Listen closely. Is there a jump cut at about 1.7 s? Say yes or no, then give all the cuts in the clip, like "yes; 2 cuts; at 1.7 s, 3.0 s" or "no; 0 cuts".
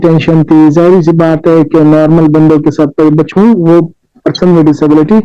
no; 1 cut; at 3.3 s